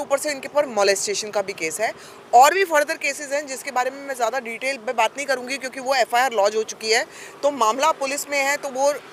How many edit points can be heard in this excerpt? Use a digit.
0